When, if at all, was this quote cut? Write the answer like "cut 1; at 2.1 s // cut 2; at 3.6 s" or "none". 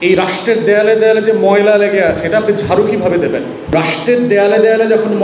cut 1; at 3.7 s